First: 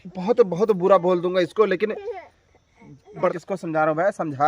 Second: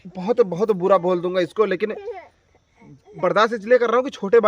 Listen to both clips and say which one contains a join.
first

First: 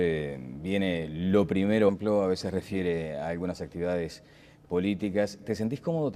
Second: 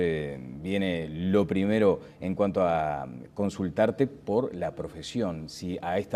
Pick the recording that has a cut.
second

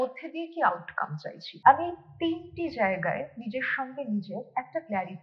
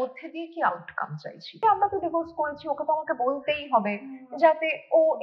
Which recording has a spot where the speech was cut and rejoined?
second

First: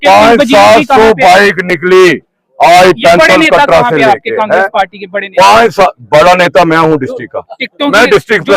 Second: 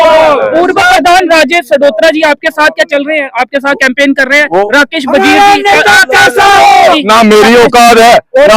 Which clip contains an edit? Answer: second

